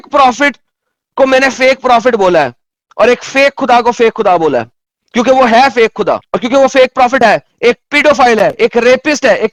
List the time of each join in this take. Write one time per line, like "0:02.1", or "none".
none